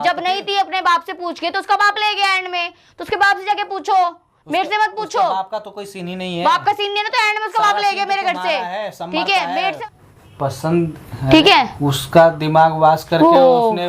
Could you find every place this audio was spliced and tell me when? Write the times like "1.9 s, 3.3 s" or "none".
9.6 s